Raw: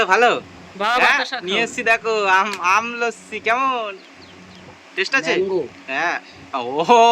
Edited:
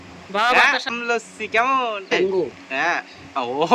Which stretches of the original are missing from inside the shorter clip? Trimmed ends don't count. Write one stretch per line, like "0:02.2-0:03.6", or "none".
0:01.4-0:02.9
0:04.1-0:05.4